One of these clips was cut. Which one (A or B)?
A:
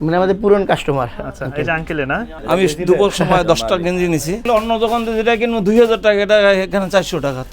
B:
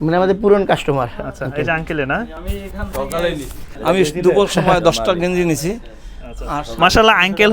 A